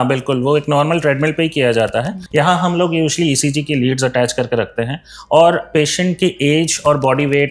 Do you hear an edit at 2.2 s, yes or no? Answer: yes